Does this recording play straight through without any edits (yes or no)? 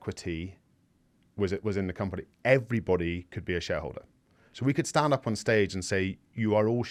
yes